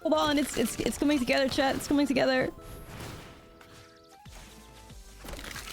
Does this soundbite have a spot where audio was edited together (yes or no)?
no